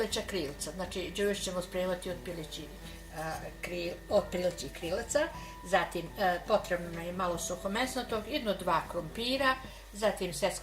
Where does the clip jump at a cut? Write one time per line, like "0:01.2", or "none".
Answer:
none